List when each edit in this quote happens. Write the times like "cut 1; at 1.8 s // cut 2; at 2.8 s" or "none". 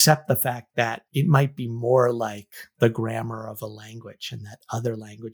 none

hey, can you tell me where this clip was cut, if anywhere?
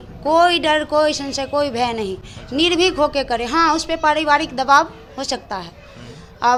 none

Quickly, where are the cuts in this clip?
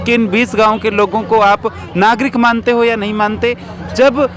none

